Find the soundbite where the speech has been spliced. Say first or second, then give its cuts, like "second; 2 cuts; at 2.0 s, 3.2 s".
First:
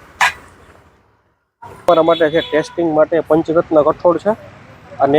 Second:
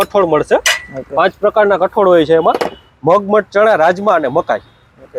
first; 1 cut; at 1.9 s